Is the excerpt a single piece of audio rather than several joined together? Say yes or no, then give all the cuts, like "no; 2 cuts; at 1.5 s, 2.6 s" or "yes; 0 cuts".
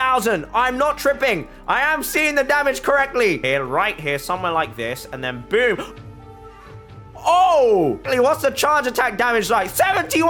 no; 2 cuts; at 3.4 s, 8.0 s